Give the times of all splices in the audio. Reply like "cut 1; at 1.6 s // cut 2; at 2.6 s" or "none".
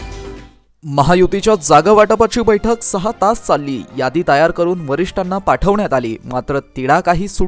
none